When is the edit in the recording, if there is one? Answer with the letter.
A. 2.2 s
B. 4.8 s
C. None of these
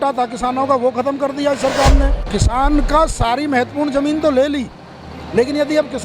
A